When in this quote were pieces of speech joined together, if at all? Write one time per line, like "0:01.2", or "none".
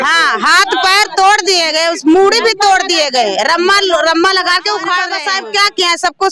0:05.2

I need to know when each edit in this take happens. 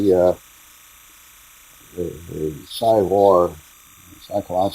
0:02.7

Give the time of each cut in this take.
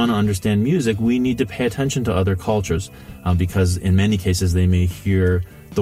0:02.8

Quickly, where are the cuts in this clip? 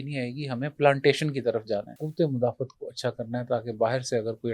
0:02.0

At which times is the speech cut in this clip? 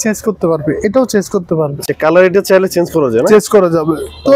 none

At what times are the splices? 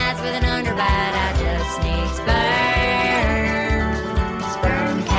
none

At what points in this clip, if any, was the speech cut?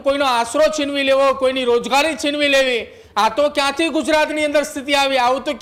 none

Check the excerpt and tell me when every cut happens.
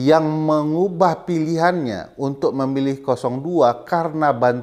none

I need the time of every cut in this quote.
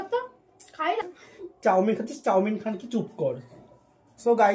0:01.0

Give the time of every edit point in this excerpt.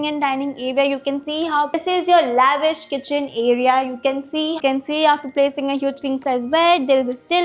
0:01.8
0:04.6

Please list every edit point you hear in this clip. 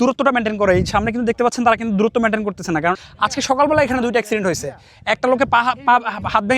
0:03.0

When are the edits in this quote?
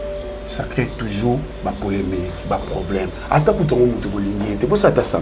none

